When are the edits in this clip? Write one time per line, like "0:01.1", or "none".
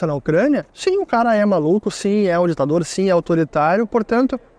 none